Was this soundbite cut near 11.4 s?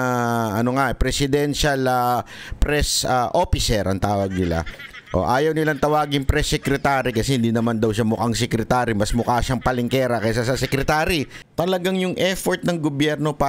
yes; 1 cut; at 11.4 s

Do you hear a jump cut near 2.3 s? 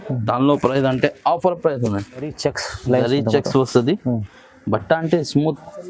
yes; 1 cut; at 2.3 s

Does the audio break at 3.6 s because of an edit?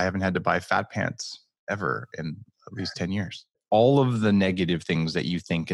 yes; 1 cut; at 3.6 s

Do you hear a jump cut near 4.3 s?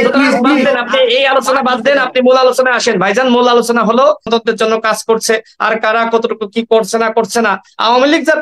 yes; 1 cut; at 4.3 s

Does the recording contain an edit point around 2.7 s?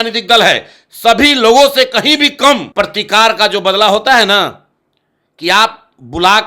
yes; 1 cut; at 2.7 s

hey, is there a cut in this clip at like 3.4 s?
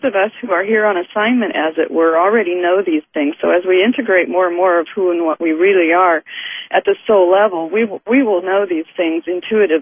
yes; 1 cut; at 3.4 s

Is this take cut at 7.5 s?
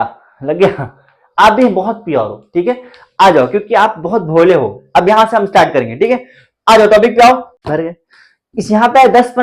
yes; 1 cut; at 7.5 s

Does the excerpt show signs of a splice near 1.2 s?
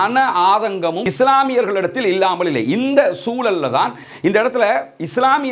no; 1 cut; at 4.0 s

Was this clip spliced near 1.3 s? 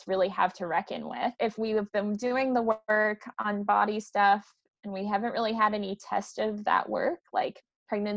yes; 1 cut; at 1.3 s

